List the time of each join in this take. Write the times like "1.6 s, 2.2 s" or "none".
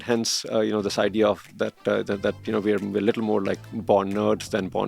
none